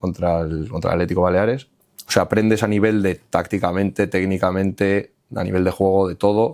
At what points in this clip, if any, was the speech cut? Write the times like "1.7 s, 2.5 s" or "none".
1.7 s

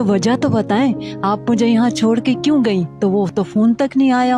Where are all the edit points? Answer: 2.9 s

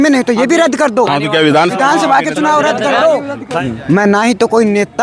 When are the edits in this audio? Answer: 3.5 s

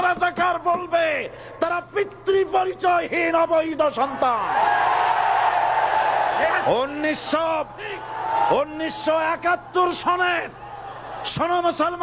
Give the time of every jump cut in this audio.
none

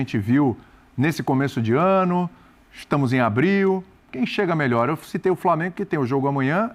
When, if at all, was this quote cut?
none

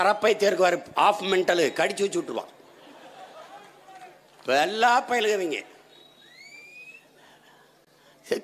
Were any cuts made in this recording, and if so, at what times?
none

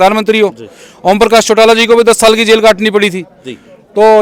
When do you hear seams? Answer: none

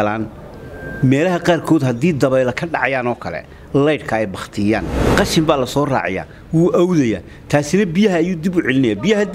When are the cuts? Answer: 5.0 s

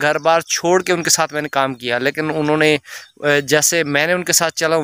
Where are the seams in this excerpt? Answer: none

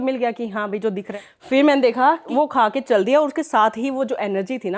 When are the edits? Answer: 1.1 s, 2.2 s

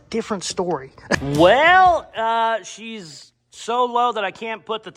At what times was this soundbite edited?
1.2 s

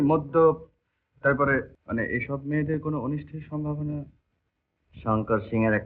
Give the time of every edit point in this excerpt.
1.8 s

